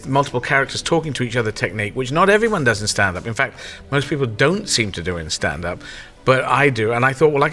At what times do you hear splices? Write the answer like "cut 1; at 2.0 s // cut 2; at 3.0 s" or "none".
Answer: none